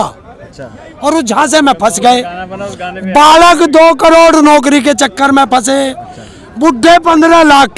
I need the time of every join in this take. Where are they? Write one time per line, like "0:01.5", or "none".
none